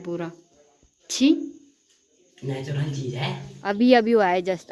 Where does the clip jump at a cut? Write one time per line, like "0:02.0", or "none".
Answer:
0:03.5